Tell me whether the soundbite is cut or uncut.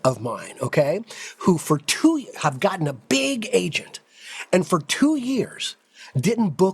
uncut